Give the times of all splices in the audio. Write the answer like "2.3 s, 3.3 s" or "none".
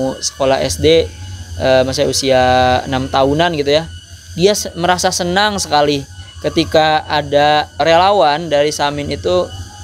7.8 s